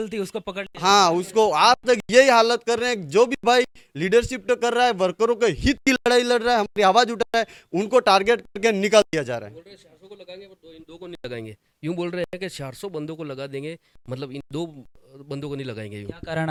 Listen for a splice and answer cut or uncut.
uncut